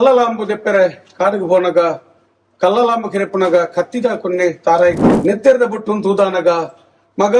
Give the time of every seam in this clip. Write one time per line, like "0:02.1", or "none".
0:05.1